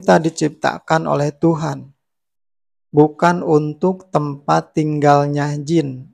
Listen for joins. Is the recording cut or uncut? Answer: uncut